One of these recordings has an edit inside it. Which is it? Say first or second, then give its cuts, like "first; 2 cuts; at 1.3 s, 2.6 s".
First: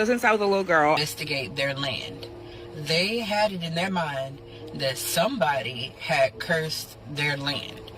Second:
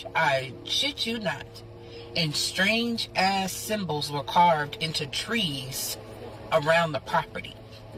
first; 1 cut; at 1.0 s